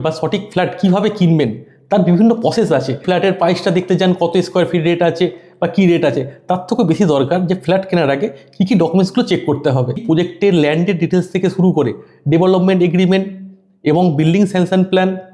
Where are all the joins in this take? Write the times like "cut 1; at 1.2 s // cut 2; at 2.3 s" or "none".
cut 1; at 3.0 s // cut 2; at 10.0 s